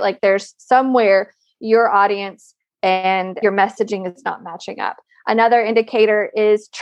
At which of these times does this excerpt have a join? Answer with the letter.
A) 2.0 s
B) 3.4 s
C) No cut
B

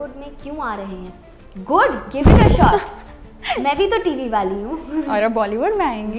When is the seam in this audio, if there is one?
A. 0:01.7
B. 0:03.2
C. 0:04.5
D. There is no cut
D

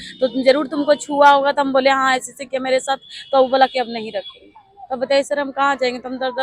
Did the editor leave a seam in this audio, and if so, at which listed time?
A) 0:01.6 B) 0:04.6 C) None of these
C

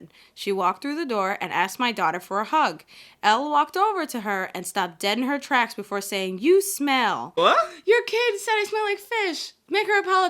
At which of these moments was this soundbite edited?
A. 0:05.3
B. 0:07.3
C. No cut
B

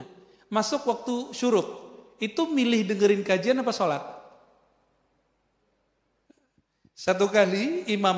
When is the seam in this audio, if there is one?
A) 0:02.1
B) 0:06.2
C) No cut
B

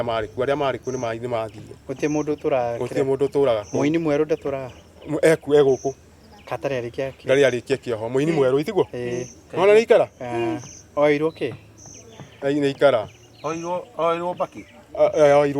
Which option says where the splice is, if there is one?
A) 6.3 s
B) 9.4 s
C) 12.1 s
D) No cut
D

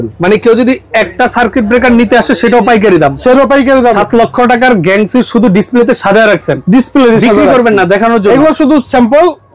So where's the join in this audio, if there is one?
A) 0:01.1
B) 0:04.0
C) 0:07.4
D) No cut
B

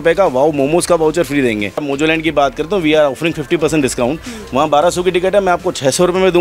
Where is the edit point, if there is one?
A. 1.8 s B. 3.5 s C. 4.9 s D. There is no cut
A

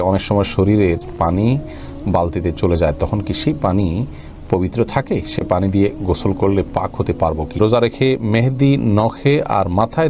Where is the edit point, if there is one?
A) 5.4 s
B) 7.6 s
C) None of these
B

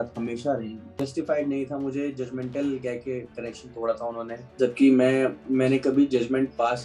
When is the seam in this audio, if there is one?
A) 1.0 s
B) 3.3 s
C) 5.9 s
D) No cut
A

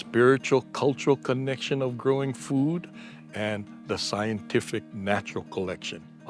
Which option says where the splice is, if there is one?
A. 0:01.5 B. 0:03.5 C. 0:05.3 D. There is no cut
D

